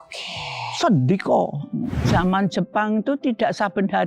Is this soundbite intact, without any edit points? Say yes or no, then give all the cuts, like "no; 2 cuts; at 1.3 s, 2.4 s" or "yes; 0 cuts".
no; 1 cut; at 2.0 s